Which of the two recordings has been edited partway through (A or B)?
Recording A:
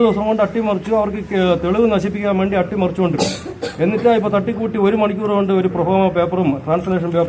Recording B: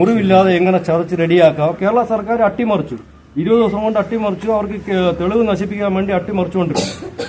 B